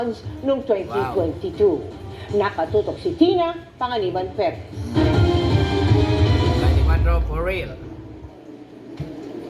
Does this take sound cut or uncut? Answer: cut